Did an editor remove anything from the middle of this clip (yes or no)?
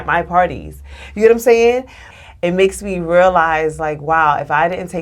yes